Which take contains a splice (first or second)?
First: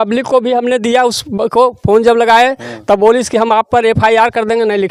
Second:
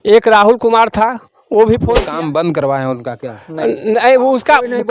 second